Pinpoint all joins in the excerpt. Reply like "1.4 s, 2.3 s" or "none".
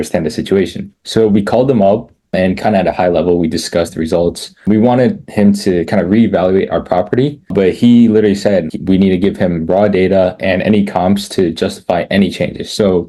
none